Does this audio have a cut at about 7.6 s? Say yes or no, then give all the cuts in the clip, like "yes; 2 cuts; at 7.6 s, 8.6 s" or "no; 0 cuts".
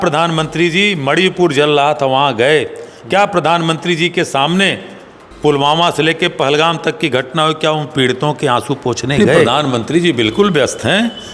no; 1 cut; at 9.5 s